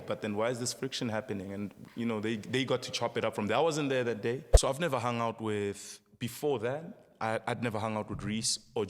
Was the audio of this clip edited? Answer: yes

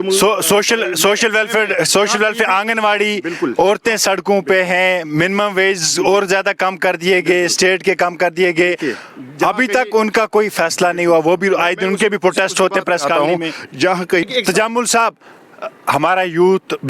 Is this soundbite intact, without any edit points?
no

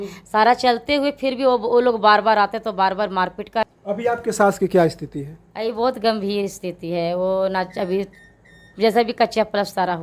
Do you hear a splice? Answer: yes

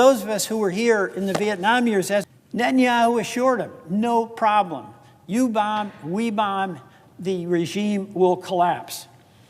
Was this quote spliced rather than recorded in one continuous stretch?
yes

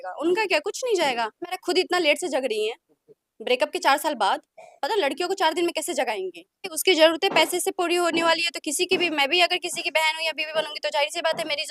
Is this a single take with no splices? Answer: no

